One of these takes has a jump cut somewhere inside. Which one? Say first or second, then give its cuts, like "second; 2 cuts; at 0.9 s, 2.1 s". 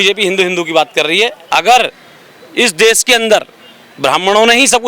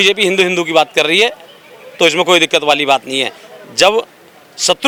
first; 1 cut; at 1.4 s